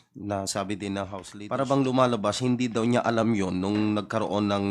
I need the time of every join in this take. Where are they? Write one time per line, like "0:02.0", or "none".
0:01.2